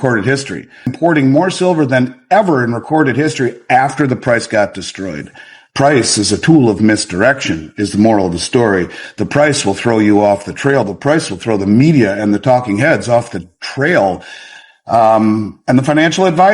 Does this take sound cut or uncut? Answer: cut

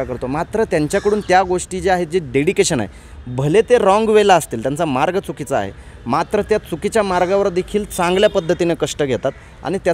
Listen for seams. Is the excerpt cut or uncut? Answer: uncut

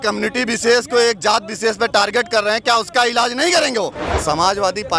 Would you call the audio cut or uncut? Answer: cut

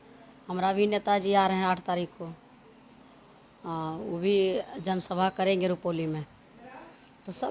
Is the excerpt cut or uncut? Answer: uncut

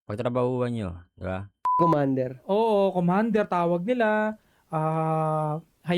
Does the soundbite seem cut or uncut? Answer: cut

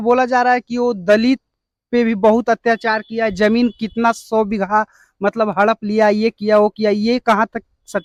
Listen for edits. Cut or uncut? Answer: uncut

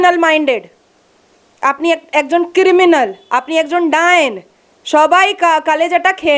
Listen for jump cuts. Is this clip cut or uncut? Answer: uncut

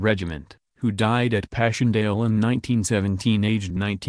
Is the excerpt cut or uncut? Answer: cut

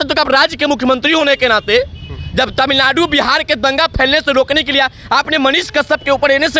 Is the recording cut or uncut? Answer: uncut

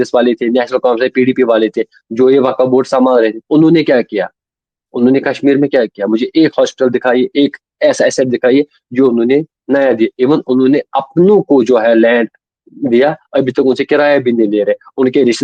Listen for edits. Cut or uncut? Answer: uncut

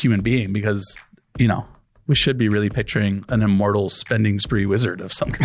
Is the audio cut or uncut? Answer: uncut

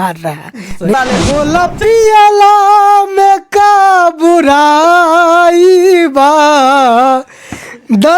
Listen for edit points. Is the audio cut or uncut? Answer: cut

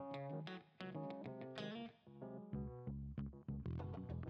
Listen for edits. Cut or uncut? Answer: uncut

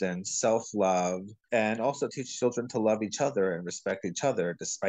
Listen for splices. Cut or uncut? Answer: uncut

